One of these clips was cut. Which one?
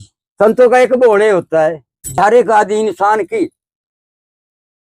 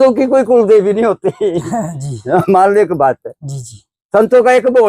first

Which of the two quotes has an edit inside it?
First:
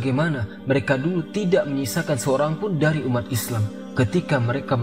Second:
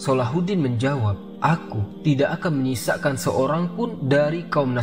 second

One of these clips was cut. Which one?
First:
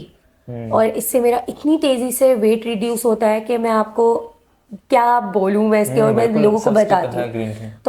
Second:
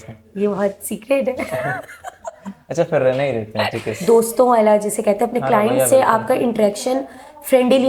second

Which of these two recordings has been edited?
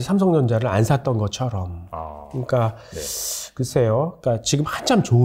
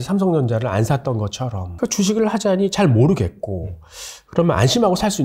second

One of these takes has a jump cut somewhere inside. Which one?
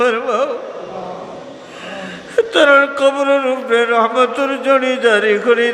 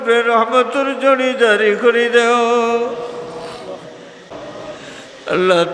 second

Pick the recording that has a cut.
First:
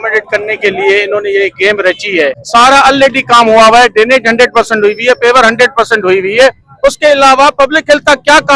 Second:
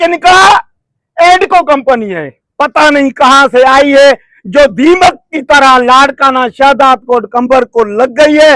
first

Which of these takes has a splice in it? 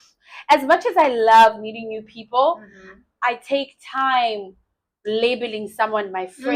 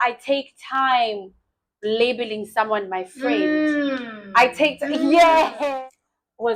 second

